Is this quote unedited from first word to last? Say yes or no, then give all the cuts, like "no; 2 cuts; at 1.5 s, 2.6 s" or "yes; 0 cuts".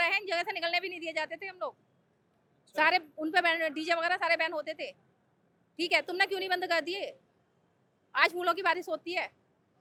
yes; 0 cuts